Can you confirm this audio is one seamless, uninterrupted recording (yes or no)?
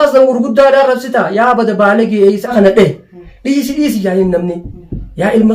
no